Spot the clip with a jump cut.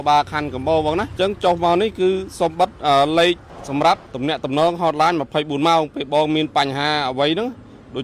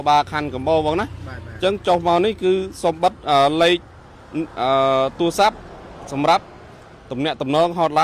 first; 3 cuts; at 1.1 s, 3.5 s, 4.1 s

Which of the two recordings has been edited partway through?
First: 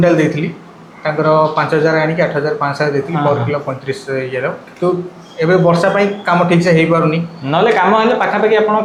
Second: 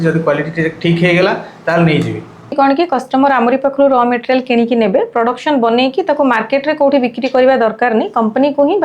second; 1 cut; at 2.5 s

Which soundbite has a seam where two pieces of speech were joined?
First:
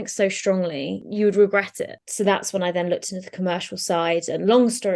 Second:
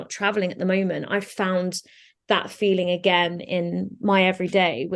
first; 2 cuts; at 1.0 s, 2.0 s

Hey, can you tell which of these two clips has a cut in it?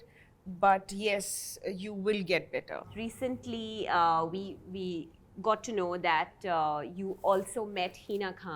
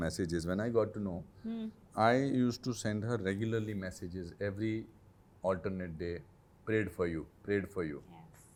first; 1 cut; at 2.9 s

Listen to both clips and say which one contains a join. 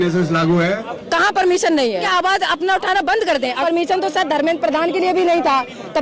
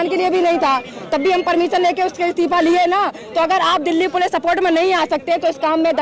first; 3 cuts; at 0.9 s, 2.1 s, 3.6 s

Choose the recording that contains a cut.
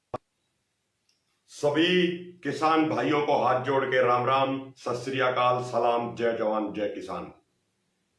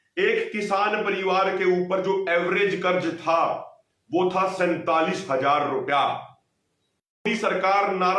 second; 1 cut; at 7.3 s

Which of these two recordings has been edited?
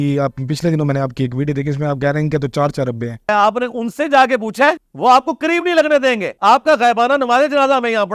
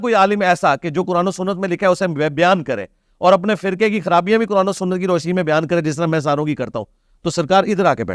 first; 3 cuts; at 3.3 s, 4.9 s, 6.3 s

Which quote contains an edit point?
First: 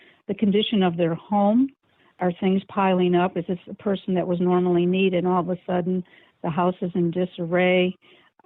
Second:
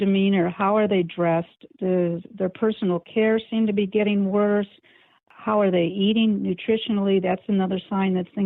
first; 1 cut; at 2.1 s

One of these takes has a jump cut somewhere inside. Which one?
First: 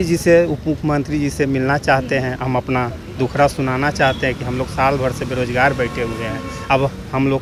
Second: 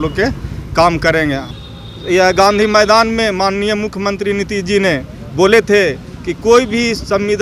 second; 1 cut; at 1.5 s

